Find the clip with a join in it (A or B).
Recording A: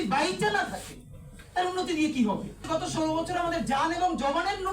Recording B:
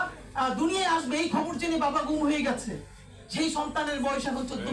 A